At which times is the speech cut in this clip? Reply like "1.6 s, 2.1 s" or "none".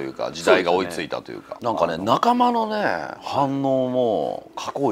1.5 s